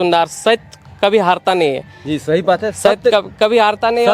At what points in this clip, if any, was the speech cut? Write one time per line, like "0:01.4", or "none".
none